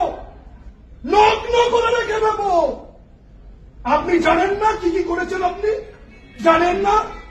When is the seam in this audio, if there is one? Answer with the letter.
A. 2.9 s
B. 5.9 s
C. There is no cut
C